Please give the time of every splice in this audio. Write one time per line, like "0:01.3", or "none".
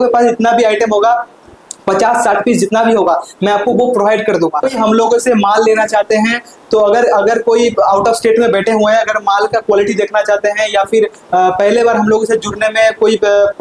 0:04.7